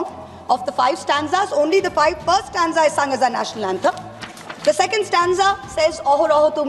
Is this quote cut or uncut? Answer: uncut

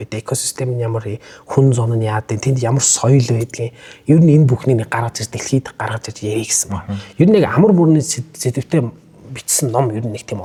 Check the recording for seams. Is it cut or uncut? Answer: uncut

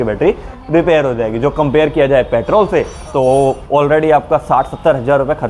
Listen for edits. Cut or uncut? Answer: uncut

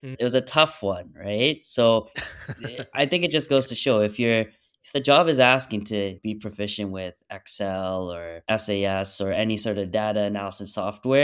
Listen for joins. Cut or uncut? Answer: cut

